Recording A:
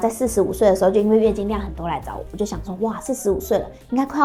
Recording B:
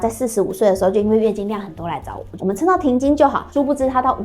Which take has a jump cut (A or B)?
B